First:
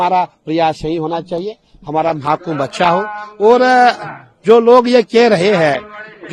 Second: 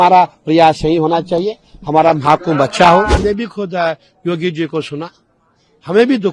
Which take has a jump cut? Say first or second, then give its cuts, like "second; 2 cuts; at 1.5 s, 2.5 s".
second; 1 cut; at 3.1 s